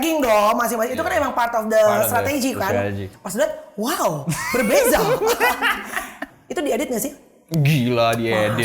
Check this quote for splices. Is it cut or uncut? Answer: cut